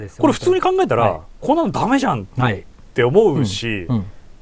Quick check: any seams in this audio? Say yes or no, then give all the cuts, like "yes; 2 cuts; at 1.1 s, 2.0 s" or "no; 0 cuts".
no; 0 cuts